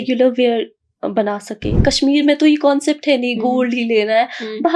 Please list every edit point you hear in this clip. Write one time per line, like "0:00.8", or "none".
0:01.8